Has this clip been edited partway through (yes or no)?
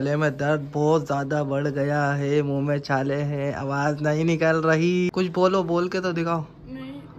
yes